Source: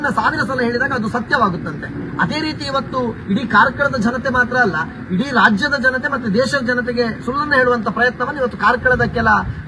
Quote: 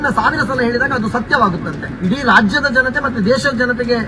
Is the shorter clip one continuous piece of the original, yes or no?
no